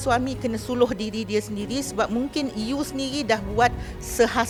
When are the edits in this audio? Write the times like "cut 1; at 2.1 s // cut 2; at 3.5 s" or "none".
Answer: none